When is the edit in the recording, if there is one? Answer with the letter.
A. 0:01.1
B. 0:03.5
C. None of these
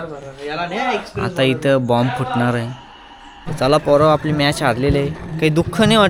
B